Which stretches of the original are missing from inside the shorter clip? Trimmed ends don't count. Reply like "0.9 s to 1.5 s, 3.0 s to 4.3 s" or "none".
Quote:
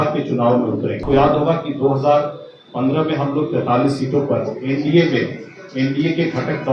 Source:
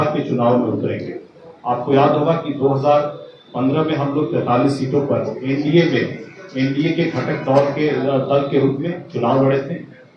1.0 s to 1.8 s